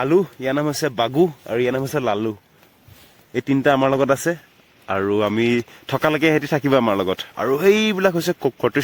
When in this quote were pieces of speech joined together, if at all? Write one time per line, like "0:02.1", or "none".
none